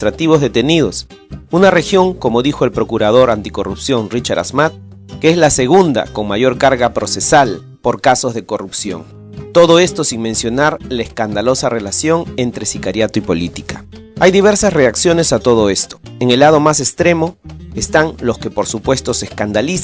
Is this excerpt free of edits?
no; 1 cut; at 4.4 s

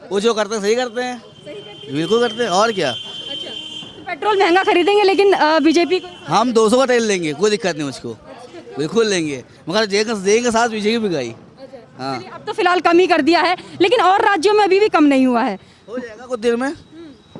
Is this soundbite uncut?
yes; 0 cuts

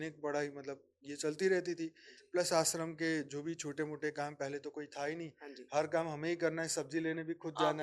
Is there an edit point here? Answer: no; 0 cuts

